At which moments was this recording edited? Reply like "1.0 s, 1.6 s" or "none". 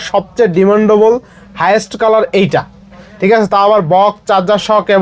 none